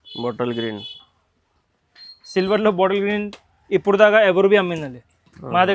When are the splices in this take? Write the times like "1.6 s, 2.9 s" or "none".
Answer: none